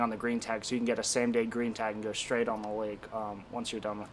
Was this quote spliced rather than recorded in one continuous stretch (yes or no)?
no